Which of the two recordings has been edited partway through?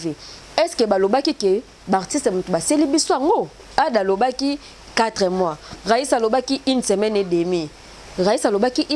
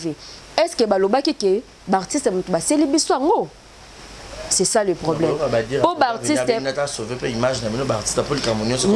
first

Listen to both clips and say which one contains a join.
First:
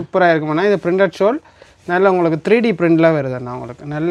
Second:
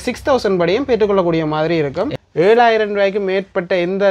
second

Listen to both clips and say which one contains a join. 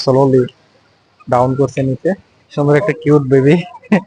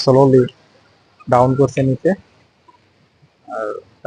first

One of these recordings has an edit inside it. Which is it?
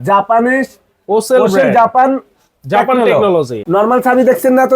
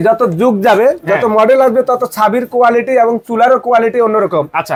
first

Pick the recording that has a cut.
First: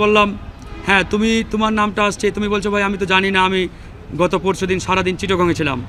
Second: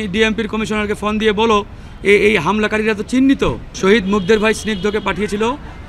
second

